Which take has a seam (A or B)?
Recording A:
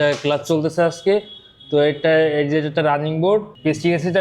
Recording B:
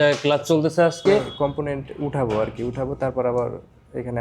B